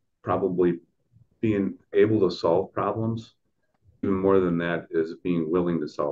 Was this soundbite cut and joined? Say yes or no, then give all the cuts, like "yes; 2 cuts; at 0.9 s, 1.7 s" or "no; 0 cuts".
yes; 2 cuts; at 1.8 s, 4.0 s